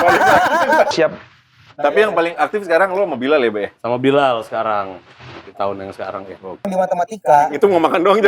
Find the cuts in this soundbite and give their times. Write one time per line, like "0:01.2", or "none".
0:00.9
0:06.7